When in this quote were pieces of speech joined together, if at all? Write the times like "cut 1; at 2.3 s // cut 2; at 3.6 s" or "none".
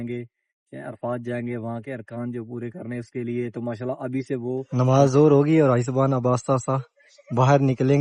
cut 1; at 4.7 s

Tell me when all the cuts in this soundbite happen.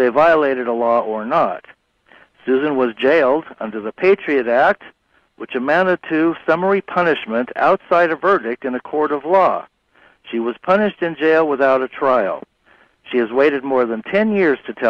cut 1; at 10.6 s

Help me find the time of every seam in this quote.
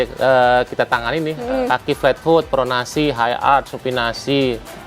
cut 1; at 1.4 s

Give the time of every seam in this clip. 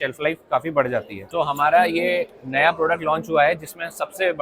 cut 1; at 1.2 s

